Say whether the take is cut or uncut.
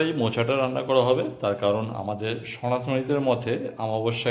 uncut